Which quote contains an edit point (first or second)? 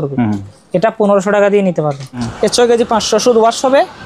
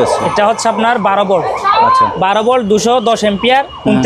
first